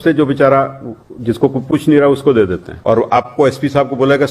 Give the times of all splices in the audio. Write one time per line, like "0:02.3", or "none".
0:02.7